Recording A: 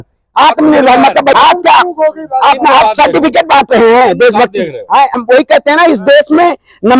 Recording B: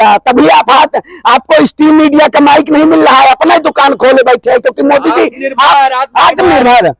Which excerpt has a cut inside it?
A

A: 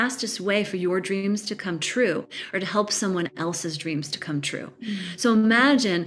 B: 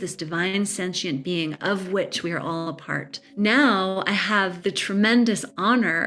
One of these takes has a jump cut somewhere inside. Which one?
B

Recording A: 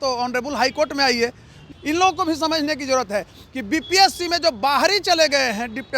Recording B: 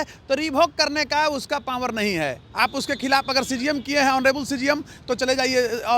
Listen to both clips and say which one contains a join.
A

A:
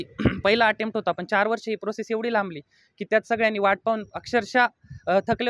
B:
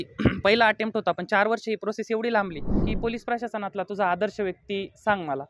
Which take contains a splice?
B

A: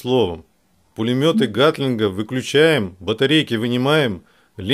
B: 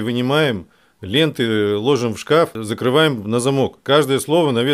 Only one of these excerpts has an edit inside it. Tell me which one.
B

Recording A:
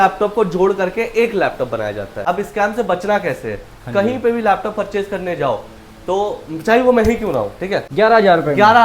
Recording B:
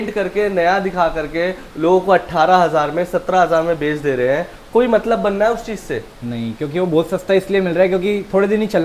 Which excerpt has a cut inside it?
A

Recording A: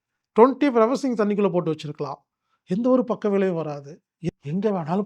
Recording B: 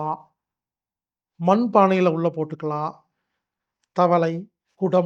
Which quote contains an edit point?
A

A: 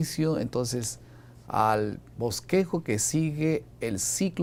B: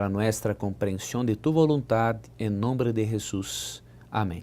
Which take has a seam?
B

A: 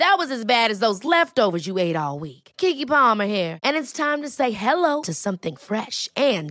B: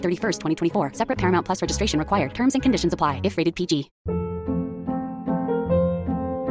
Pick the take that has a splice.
B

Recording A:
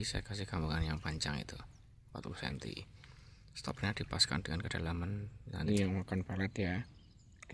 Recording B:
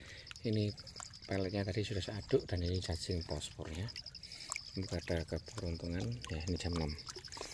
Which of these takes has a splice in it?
A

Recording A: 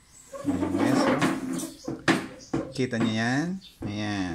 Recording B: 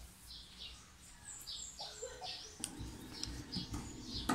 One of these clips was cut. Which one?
B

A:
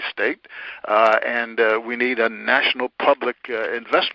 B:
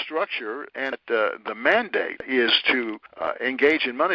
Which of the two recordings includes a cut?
B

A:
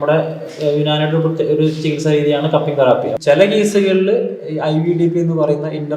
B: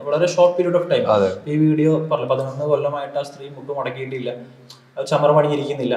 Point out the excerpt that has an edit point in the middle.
A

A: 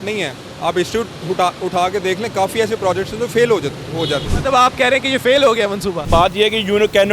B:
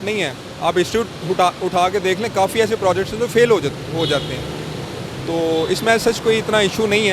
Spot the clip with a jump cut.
A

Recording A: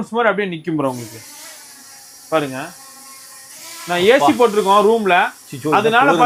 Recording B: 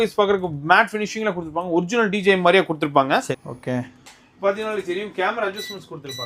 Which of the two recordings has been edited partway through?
B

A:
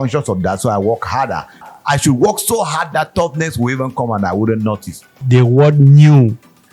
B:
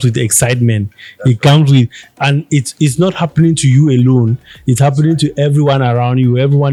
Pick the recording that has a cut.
A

